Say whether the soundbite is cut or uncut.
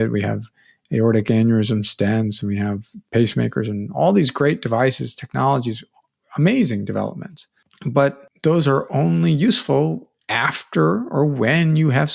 uncut